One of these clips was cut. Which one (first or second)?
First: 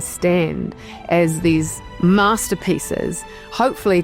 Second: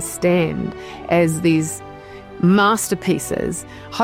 first